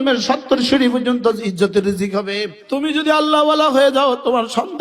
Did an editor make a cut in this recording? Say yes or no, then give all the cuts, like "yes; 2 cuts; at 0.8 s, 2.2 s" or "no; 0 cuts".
yes; 1 cut; at 2.6 s